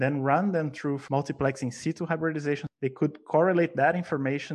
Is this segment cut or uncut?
cut